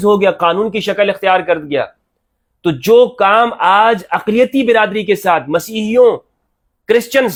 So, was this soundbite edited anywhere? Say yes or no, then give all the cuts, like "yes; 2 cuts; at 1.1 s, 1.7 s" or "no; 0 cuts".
no; 0 cuts